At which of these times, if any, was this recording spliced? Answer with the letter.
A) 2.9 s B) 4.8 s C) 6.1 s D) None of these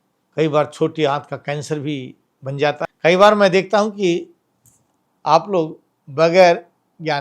A